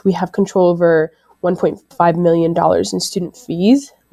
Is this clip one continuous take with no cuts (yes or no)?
yes